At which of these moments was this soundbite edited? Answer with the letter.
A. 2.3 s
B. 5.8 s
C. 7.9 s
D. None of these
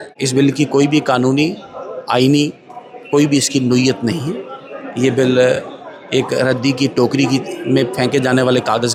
D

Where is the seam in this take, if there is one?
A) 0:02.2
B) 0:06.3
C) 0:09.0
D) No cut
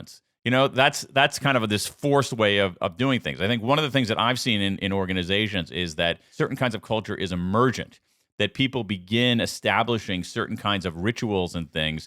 B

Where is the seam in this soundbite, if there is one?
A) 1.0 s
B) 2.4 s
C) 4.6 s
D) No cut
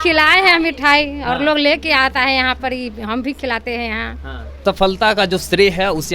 C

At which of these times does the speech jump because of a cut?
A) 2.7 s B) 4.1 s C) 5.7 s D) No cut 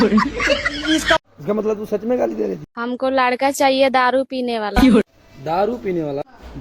A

